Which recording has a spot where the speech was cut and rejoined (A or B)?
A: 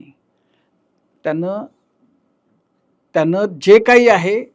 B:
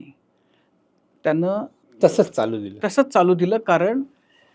B